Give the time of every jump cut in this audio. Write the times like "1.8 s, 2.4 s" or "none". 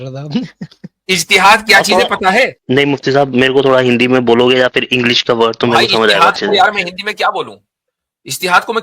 2.6 s